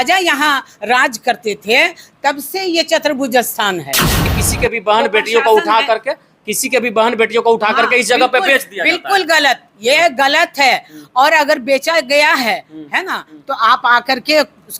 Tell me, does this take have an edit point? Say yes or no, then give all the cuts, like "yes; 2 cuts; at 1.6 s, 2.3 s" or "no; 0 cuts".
yes; 1 cut; at 4.4 s